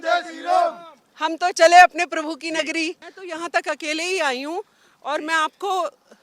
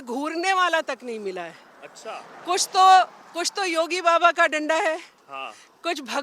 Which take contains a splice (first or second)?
first